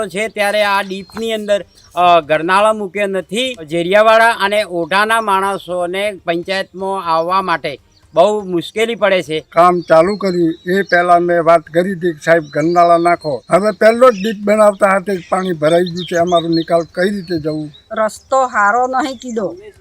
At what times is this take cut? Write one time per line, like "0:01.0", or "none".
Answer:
0:03.7
0:09.5
0:13.3
0:17.8